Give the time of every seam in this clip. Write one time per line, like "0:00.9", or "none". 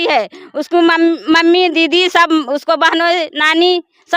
none